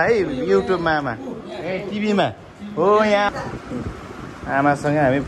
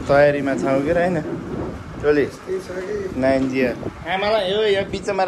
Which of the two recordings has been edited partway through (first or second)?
first